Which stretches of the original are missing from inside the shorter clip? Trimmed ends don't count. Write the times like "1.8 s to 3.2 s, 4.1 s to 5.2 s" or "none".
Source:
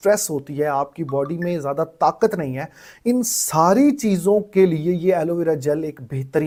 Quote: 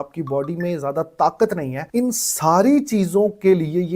2.6 s to 2.9 s